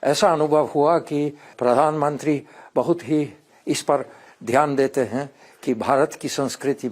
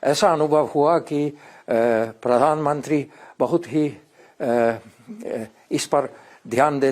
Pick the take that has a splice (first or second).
first